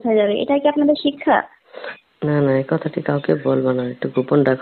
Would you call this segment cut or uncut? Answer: uncut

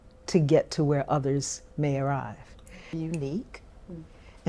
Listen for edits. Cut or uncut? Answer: cut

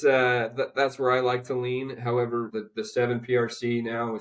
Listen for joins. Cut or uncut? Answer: cut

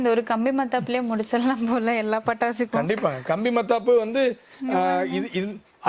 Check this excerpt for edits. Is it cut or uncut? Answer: uncut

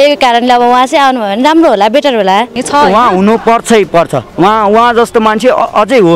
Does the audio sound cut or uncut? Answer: cut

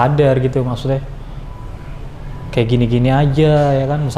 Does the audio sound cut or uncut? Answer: uncut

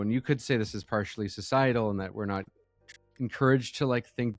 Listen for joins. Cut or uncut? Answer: uncut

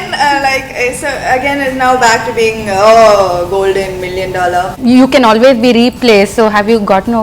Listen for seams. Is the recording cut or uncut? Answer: cut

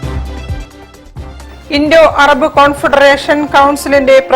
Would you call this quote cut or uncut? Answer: uncut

